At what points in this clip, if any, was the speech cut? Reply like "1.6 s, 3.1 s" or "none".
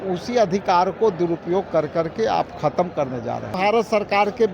3.6 s